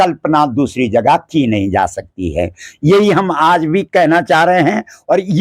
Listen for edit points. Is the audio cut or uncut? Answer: uncut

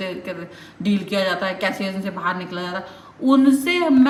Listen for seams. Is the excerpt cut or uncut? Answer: uncut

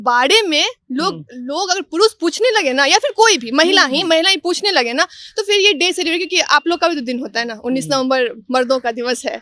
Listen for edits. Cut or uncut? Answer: uncut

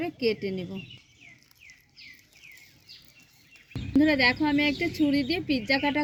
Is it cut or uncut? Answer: uncut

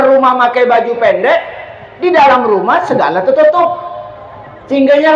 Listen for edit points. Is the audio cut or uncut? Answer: uncut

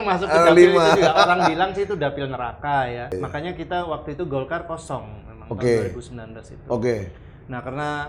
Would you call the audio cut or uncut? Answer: cut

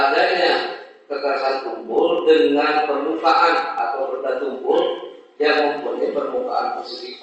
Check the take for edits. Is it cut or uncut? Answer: uncut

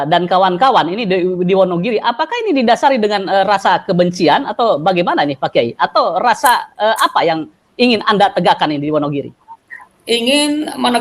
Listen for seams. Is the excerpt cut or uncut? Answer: uncut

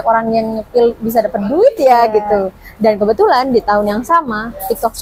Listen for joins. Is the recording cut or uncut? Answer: uncut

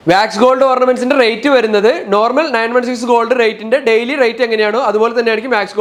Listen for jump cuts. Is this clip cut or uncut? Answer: uncut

